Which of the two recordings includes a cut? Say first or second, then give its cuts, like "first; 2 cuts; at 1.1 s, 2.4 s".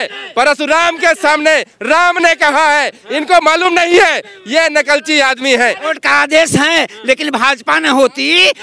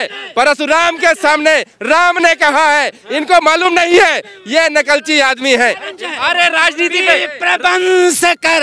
first; 1 cut; at 6.0 s